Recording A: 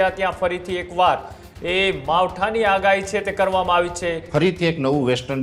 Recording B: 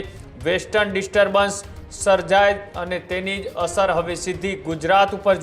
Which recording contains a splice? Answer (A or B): A